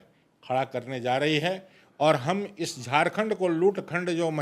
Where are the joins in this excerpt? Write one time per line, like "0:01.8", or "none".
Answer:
none